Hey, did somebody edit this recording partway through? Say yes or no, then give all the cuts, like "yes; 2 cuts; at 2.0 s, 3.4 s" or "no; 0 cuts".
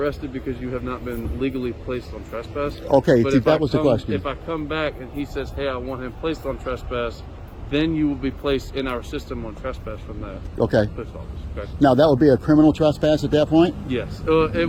no; 0 cuts